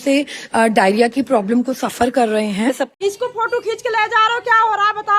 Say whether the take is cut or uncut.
cut